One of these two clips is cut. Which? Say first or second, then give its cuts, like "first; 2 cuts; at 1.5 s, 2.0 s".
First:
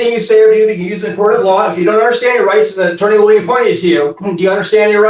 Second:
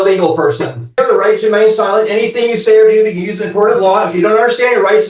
second; 1 cut; at 0.9 s